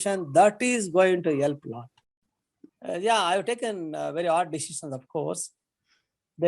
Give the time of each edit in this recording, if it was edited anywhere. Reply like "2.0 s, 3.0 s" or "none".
2.3 s